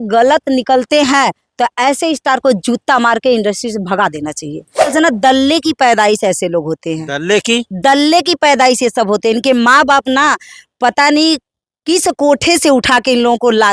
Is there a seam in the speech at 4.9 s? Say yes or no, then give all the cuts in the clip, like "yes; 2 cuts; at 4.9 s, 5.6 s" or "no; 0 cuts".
yes; 1 cut; at 4.9 s